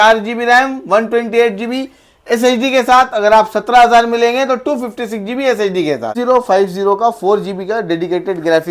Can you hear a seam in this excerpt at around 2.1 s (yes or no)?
no